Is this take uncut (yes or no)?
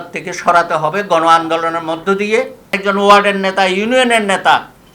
no